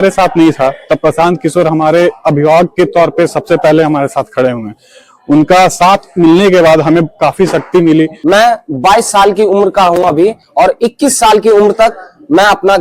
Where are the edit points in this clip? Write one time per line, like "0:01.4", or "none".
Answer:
0:08.2